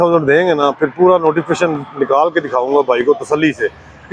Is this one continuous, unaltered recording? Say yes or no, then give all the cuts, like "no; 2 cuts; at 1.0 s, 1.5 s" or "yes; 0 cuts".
yes; 0 cuts